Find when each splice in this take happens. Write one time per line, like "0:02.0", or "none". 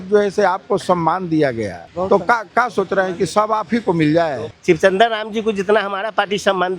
0:01.8
0:04.5